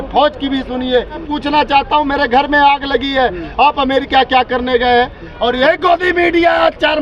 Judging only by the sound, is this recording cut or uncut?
cut